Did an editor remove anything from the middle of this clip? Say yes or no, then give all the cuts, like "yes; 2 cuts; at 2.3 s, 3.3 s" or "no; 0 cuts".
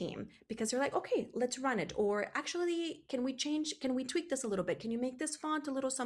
no; 0 cuts